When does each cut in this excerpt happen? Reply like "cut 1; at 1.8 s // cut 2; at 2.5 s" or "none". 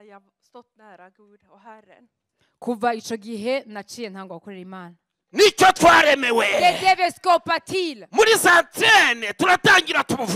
cut 1; at 5.2 s